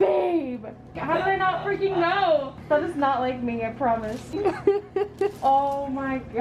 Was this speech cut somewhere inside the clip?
yes; 3 cuts; at 1.0 s, 2.5 s, 4.3 s

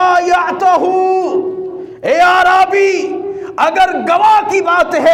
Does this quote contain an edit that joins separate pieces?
no; 0 cuts

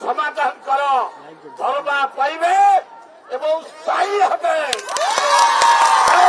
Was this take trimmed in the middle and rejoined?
no; 0 cuts

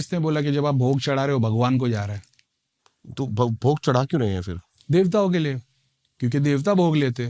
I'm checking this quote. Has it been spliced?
no; 0 cuts

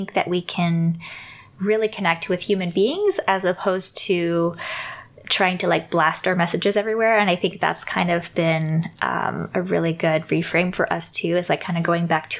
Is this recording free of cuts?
yes; 0 cuts

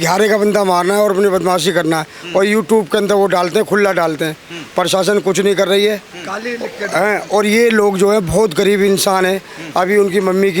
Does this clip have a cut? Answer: no; 0 cuts

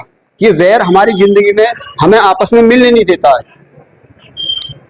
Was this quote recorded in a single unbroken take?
yes; 0 cuts

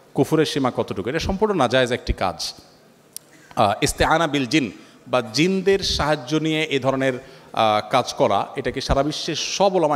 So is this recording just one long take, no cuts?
yes; 0 cuts

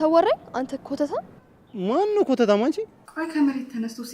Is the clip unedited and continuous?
no; 1 cut; at 3.0 s

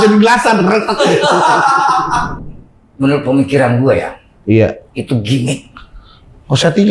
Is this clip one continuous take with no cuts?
no; 1 cut; at 2.4 s

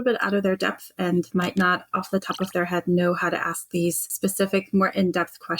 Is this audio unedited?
no; 2 cuts; at 1.3 s, 4.1 s

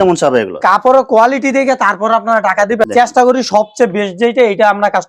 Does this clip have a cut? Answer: yes; 1 cut; at 2.9 s

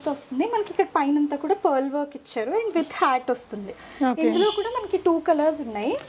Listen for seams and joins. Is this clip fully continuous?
yes; 0 cuts

